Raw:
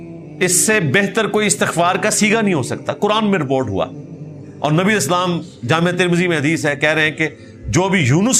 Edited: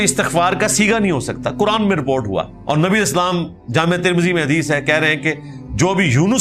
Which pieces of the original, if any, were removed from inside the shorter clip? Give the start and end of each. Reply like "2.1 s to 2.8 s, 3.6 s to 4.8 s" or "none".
4.0 s to 4.5 s

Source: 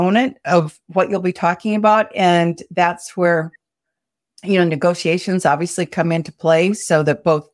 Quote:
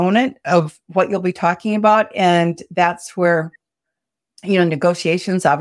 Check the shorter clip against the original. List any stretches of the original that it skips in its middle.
none

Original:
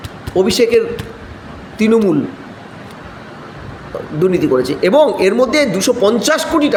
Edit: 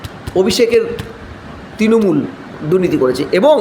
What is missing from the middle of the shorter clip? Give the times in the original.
2.5 s to 4.0 s

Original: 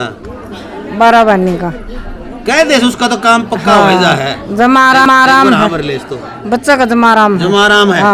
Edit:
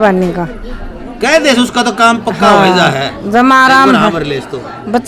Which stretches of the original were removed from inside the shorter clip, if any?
5.0 s to 5.3 s

